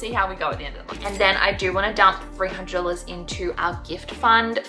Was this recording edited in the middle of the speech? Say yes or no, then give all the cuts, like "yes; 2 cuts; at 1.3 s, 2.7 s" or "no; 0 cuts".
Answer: yes; 1 cut; at 1.0 s